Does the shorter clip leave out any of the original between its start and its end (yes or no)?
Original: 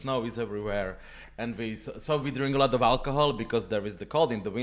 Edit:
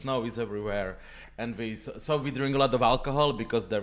no